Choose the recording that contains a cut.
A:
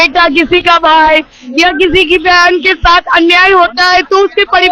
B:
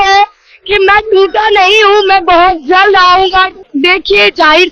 B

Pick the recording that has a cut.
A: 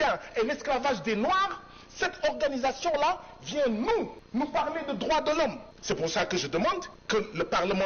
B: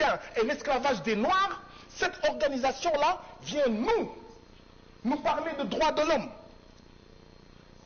A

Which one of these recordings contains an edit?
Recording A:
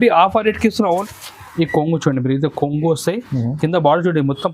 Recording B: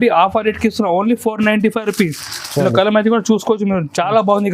A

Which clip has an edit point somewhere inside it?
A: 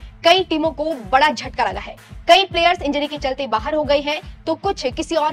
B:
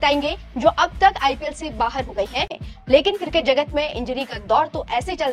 B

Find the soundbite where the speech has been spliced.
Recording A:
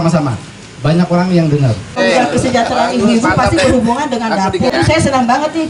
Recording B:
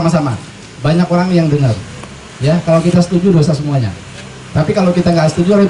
A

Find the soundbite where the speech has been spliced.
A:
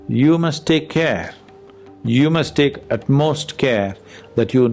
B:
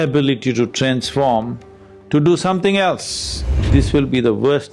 B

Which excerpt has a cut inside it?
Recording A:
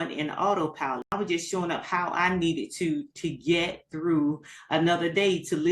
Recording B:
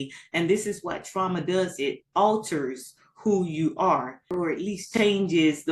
A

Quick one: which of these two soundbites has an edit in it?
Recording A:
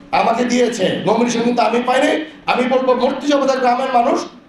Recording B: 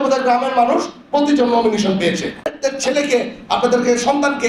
B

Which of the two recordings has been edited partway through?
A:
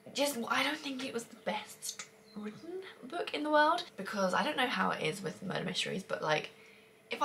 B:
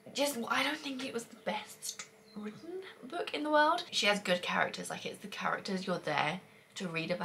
B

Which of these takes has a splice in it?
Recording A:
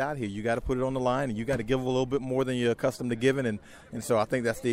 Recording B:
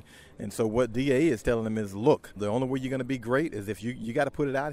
B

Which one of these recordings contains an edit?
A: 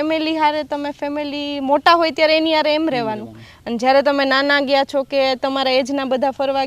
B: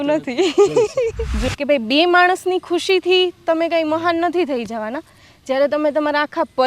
B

